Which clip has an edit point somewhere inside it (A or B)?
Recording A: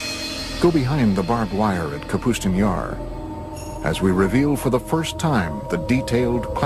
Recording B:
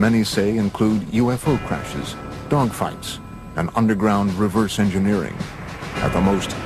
A